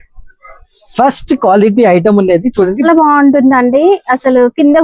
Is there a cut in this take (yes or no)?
yes